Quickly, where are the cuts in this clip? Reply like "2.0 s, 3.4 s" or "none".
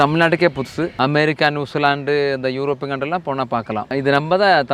0.9 s